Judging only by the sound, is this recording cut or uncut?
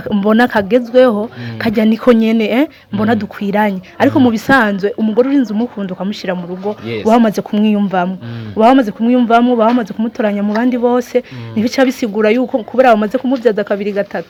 uncut